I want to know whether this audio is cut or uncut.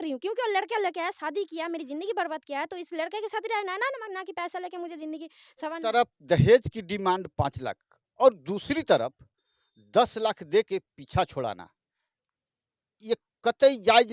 cut